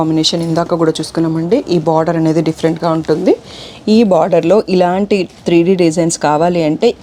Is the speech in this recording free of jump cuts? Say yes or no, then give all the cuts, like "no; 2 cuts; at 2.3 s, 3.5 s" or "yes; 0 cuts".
yes; 0 cuts